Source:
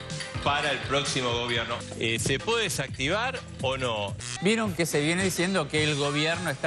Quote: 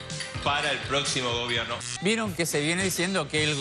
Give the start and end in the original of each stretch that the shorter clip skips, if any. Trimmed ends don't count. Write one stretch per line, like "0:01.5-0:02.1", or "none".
0:01.8-0:04.2